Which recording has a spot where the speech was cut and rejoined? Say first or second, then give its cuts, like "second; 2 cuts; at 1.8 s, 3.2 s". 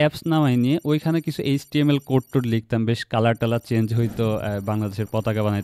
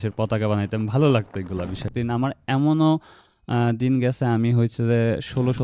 second; 1 cut; at 1.9 s